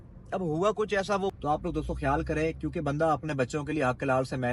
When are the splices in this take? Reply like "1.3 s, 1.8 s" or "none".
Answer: 1.4 s